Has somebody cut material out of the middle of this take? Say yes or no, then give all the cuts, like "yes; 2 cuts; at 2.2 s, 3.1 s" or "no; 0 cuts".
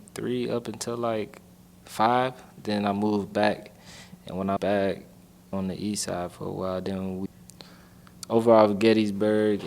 yes; 3 cuts; at 4.6 s, 5.5 s, 7.3 s